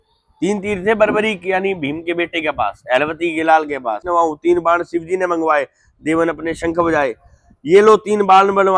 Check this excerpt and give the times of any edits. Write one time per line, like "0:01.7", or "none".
0:04.0